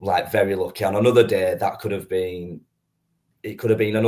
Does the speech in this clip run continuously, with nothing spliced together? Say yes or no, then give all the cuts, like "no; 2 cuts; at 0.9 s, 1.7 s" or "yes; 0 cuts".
yes; 0 cuts